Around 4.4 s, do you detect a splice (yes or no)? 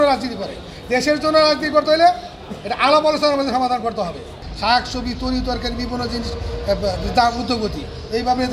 yes